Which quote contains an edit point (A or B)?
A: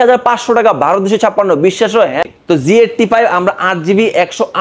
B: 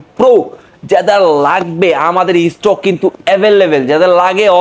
A